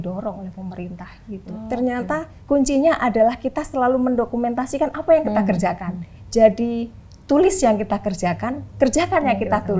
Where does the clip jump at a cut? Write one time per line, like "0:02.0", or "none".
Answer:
0:01.5
0:08.6

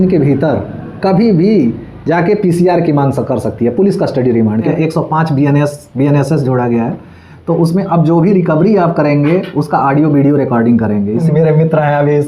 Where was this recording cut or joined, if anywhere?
0:04.7
0:11.2

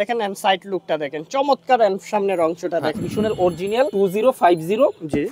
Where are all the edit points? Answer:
0:03.1
0:03.9

